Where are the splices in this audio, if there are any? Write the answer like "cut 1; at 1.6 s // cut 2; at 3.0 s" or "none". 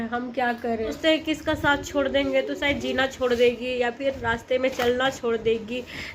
cut 1; at 1.0 s